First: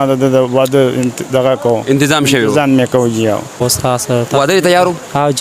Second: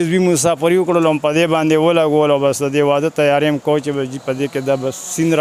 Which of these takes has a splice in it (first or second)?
first